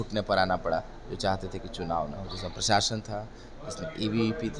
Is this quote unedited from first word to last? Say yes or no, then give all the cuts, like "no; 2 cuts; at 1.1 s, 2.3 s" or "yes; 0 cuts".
yes; 0 cuts